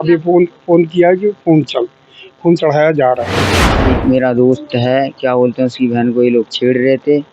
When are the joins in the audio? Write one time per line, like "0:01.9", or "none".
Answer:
0:03.9